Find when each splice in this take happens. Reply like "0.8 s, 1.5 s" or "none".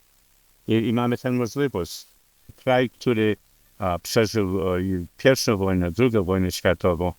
2.5 s